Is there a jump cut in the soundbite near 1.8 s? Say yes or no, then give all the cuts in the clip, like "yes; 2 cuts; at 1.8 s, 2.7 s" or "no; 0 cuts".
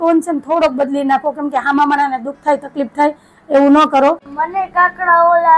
no; 1 cut; at 4.5 s